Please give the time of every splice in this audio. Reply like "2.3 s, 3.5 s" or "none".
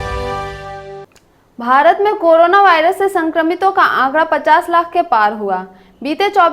1.0 s